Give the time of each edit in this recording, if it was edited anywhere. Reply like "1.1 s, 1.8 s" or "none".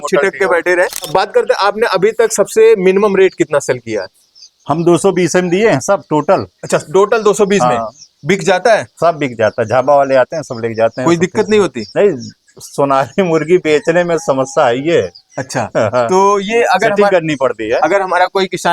1.1 s